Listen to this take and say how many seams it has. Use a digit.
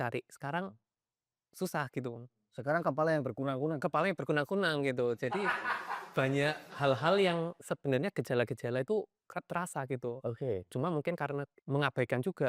1